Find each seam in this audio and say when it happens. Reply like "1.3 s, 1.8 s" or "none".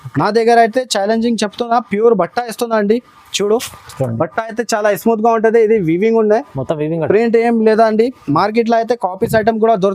none